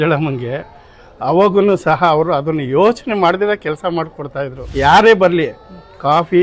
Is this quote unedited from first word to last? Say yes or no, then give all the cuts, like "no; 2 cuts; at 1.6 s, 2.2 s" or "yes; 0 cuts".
no; 1 cut; at 4.6 s